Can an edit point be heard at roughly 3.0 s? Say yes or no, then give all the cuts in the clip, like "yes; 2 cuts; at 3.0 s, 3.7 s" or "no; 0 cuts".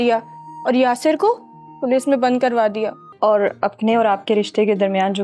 yes; 1 cut; at 3.0 s